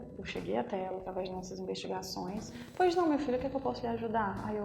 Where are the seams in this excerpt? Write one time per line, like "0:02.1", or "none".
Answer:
0:02.6